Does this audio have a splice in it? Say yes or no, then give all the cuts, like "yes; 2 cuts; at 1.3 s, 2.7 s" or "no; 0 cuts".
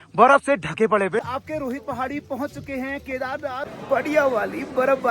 yes; 2 cuts; at 1.2 s, 3.7 s